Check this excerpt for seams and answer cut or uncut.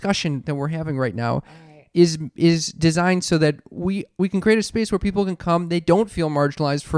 cut